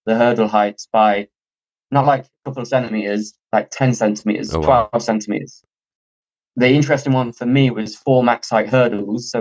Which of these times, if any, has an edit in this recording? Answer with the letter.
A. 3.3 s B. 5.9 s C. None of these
B